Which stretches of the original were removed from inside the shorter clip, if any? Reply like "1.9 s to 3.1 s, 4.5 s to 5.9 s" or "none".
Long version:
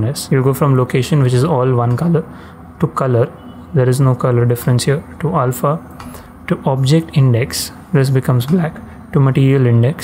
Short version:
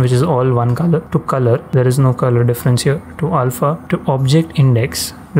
2.6 s to 3.4 s, 5.8 s to 6.4 s